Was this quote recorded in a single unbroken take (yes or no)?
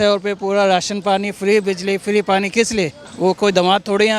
no